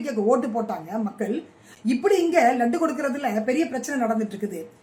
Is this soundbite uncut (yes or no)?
yes